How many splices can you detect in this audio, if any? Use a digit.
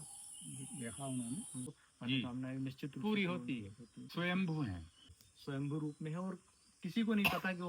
2